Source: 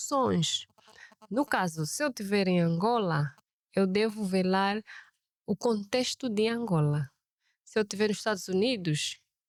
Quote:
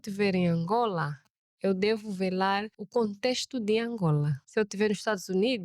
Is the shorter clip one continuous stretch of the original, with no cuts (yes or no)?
no